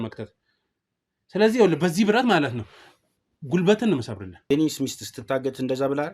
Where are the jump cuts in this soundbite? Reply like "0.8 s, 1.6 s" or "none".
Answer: 4.5 s

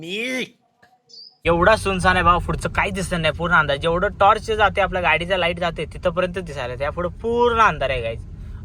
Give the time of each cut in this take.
1.4 s

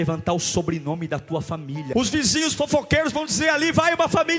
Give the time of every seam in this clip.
1.9 s

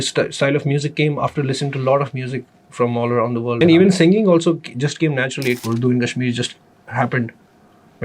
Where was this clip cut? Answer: 3.6 s, 5.6 s

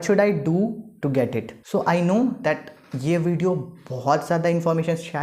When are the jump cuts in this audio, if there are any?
none

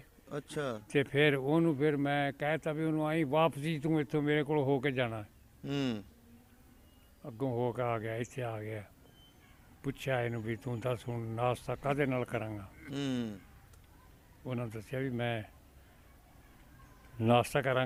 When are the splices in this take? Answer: none

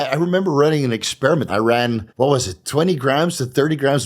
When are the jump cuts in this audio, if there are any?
1.5 s

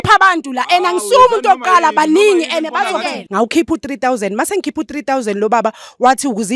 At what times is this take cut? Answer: 3.2 s

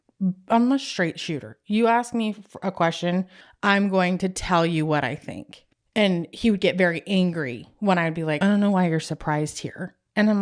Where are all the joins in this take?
8.4 s

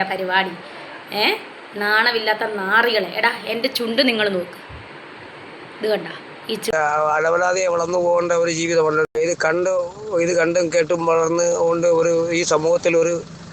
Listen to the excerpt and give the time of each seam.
6.7 s, 9.0 s

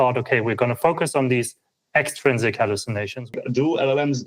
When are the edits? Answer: 3.3 s

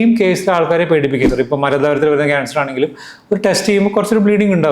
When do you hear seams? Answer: 1.3 s

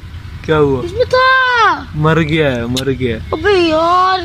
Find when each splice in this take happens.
none

